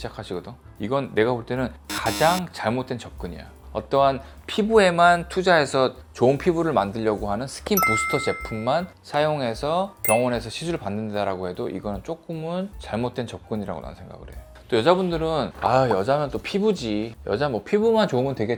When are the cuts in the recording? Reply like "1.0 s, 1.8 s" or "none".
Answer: none

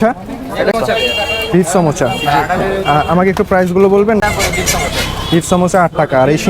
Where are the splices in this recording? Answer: 0.7 s, 4.2 s

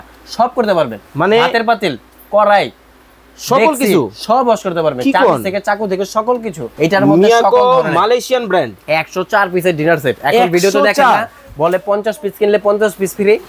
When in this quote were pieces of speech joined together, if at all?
6.7 s

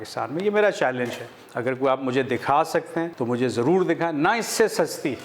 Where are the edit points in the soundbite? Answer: none

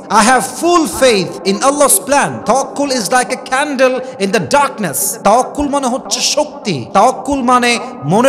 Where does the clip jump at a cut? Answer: 2.4 s

